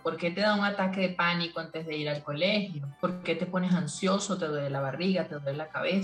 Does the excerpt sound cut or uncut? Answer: uncut